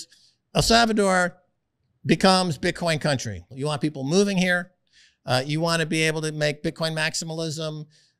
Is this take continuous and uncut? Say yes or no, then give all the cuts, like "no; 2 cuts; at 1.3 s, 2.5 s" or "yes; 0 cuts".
no; 1 cut; at 3.5 s